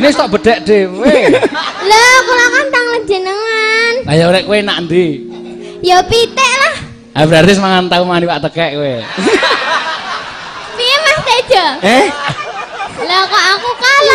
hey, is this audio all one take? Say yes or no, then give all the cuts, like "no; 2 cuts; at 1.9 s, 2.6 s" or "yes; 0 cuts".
yes; 0 cuts